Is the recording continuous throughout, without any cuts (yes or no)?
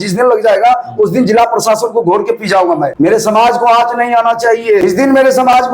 no